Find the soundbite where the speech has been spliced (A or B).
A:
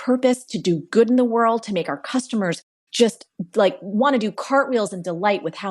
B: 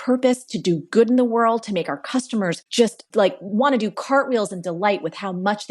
B